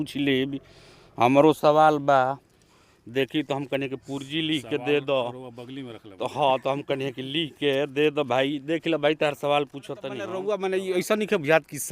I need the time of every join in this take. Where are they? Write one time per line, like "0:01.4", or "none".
0:10.2